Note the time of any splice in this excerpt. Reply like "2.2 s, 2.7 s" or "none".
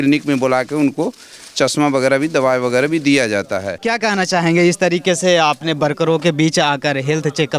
3.8 s

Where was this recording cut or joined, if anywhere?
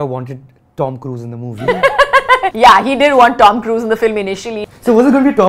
2.5 s, 4.6 s

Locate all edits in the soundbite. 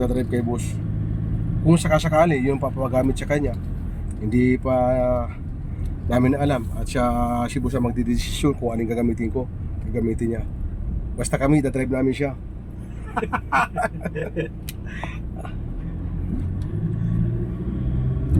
none

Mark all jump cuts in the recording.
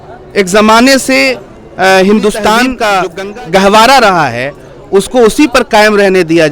2.8 s

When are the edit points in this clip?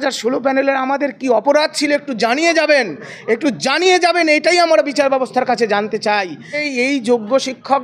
6.7 s

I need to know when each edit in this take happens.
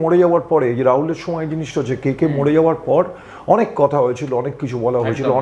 none

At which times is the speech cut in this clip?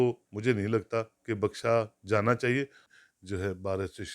2.8 s

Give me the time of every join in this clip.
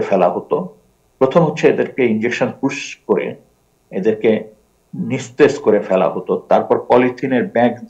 none

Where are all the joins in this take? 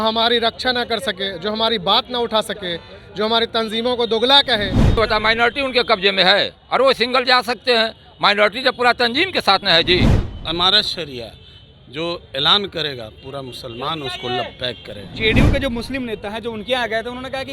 4.9 s, 10.2 s

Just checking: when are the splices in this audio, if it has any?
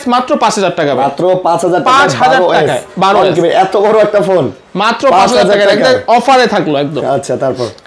none

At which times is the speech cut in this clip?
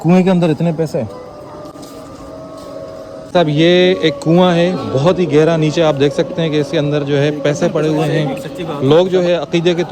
none

